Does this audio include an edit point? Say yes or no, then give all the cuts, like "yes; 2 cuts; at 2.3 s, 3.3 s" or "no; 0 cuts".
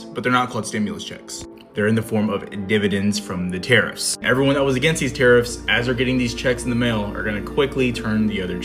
yes; 1 cut; at 4.2 s